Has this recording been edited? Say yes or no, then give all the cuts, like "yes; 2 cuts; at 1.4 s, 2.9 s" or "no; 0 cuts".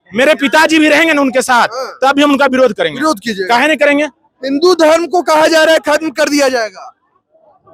no; 0 cuts